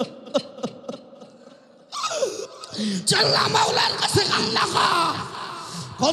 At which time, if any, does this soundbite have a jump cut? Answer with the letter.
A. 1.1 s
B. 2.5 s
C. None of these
B